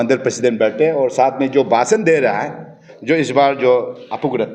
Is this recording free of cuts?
yes; 0 cuts

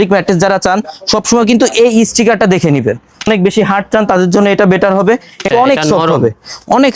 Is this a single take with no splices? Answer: no; 2 cuts; at 3.3 s, 5.5 s

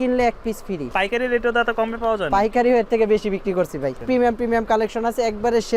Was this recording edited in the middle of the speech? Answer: yes; 2 cuts; at 0.9 s, 4.0 s

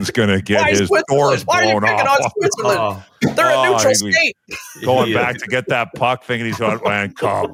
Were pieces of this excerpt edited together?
no; 0 cuts

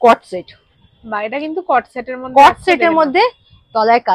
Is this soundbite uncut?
yes; 0 cuts

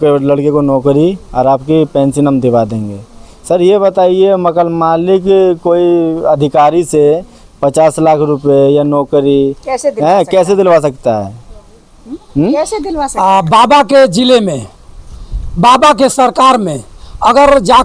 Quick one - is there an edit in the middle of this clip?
no; 0 cuts

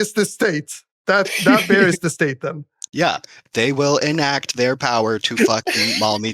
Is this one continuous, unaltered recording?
no; 1 cut; at 3.3 s

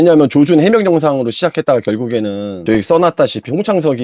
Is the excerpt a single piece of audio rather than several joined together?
yes; 0 cuts

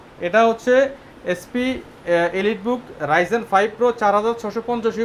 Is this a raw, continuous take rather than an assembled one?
yes; 0 cuts

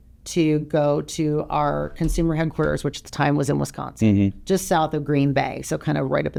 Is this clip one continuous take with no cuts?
yes; 0 cuts

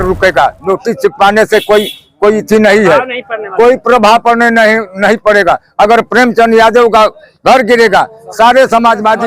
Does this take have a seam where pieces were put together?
no; 0 cuts

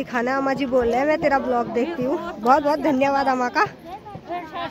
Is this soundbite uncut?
yes; 0 cuts

